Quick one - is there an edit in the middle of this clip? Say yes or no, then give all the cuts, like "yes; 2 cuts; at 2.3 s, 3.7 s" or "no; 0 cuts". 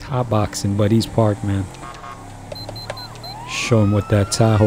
yes; 1 cut; at 3.6 s